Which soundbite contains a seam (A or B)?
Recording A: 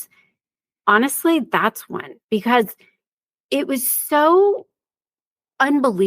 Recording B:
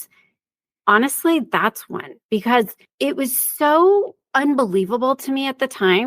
B